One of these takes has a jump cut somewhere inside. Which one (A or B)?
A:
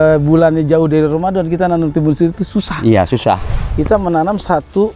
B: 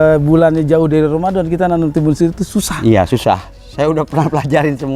A